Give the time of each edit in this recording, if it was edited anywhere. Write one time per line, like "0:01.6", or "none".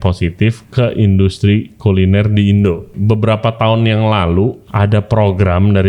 0:02.9
0:04.6